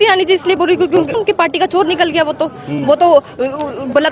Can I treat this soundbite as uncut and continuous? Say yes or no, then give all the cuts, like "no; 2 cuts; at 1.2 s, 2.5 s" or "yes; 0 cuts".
no; 1 cut; at 1.1 s